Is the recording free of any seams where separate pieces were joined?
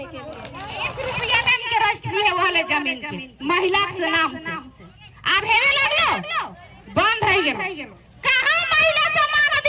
no; 1 cut; at 1.0 s

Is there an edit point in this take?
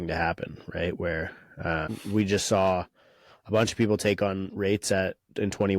yes; 1 cut; at 1.9 s

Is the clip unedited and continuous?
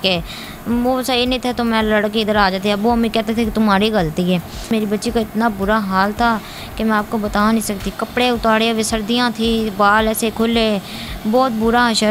no; 1 cut; at 4.7 s

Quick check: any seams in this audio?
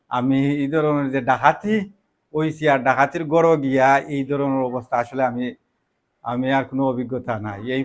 no; 0 cuts

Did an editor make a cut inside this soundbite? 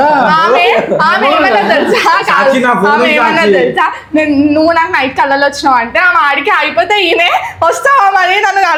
no; 0 cuts

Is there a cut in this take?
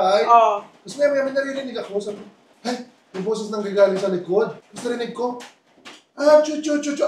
no; 0 cuts

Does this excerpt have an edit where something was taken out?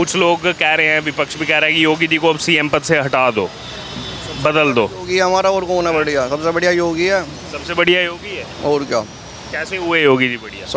no; 0 cuts

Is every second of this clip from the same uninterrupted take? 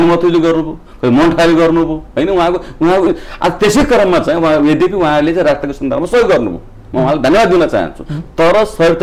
yes; 0 cuts

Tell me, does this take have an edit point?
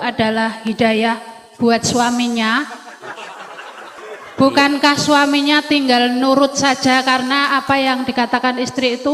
yes; 1 cut; at 4.0 s

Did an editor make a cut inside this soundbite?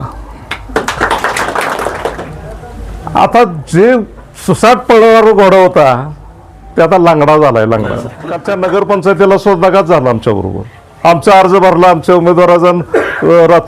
yes; 2 cuts; at 1.7 s, 8.5 s

